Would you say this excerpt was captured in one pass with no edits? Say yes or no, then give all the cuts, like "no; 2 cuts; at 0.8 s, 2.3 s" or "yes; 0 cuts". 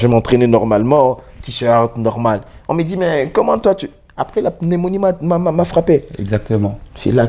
yes; 0 cuts